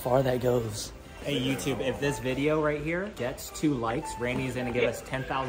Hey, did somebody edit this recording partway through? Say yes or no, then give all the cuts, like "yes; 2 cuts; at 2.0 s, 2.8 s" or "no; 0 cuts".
yes; 2 cuts; at 1.2 s, 3.1 s